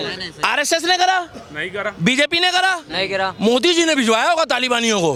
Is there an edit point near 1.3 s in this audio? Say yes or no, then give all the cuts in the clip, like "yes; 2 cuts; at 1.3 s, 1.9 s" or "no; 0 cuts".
no; 0 cuts